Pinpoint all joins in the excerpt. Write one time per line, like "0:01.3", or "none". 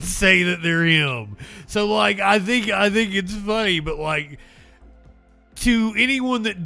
none